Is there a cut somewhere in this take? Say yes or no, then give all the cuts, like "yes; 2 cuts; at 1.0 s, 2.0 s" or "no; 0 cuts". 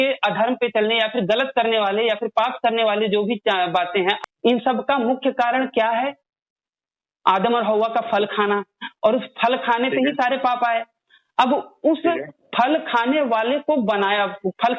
yes; 1 cut; at 4.2 s